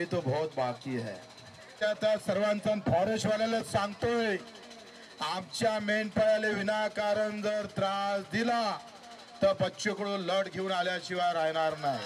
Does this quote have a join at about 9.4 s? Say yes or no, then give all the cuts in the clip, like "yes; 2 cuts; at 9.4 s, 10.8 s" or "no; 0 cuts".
no; 1 cut; at 1.8 s